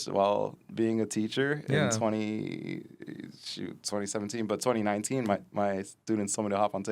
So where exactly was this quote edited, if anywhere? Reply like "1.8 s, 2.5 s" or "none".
none